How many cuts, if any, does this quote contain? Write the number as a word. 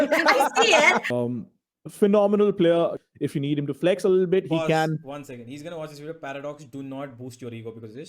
two